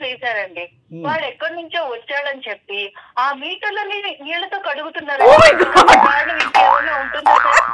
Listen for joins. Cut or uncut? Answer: uncut